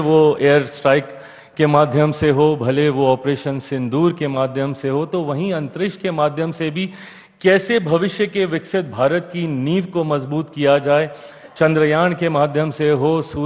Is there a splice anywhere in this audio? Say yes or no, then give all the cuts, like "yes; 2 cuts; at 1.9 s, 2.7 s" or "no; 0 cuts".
no; 0 cuts